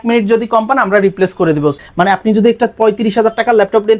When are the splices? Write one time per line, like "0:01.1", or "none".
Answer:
0:01.8